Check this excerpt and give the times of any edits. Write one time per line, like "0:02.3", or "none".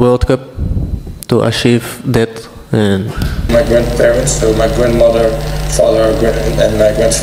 0:03.5